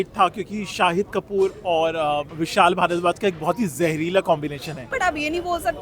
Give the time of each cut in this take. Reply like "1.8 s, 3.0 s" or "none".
2.4 s, 4.8 s